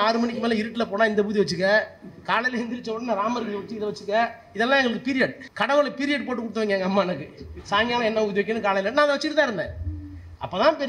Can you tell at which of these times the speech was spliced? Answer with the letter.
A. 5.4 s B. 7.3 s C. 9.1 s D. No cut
A